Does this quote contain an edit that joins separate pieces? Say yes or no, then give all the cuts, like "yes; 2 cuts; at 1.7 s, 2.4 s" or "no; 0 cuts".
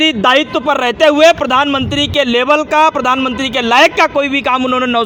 no; 0 cuts